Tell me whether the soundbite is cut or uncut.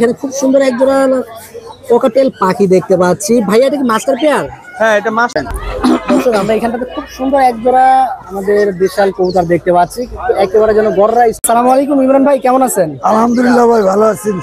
cut